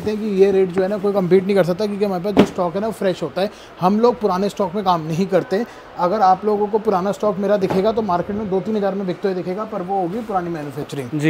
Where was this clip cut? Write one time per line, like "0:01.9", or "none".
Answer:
none